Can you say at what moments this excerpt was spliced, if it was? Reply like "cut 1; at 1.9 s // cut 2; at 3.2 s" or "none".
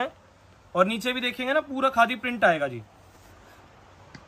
cut 1; at 3.3 s